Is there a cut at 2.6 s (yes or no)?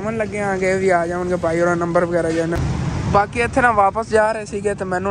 yes